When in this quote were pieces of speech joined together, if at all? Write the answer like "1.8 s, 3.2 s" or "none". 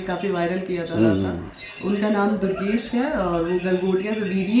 none